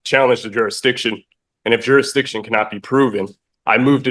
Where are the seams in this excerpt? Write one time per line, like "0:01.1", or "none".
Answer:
none